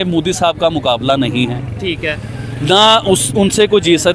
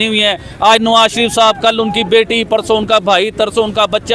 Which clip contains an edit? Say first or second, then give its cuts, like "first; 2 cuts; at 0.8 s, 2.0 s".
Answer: first; 1 cut; at 1.7 s